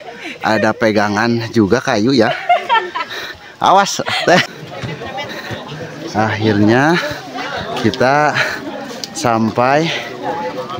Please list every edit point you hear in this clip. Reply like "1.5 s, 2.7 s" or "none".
4.4 s